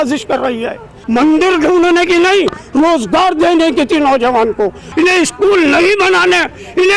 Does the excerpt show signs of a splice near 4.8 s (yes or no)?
yes